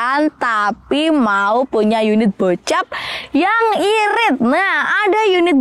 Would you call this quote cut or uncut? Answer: uncut